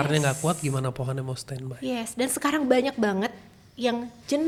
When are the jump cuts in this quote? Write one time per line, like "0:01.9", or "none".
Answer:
none